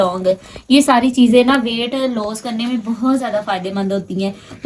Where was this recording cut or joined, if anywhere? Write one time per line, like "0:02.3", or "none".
none

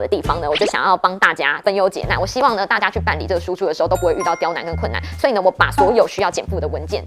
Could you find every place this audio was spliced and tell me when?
none

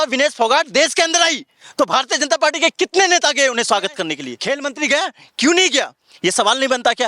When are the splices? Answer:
0:04.4

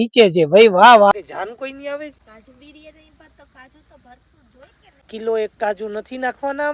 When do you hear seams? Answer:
0:01.1
0:02.2
0:05.1

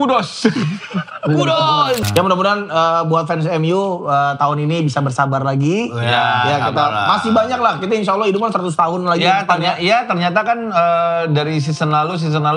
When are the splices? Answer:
0:02.0

